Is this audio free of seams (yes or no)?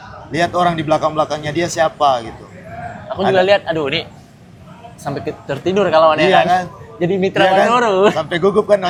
yes